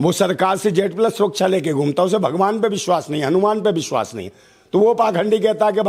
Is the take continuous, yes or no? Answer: yes